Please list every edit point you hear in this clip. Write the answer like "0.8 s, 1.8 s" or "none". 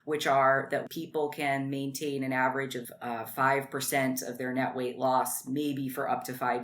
0.9 s, 2.8 s